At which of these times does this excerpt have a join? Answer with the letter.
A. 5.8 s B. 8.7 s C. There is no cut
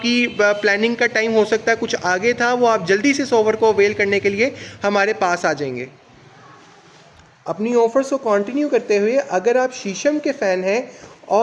C